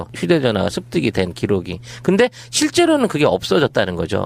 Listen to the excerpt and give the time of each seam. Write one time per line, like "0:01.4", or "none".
0:01.5